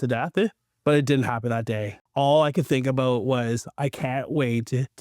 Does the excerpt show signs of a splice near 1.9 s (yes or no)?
yes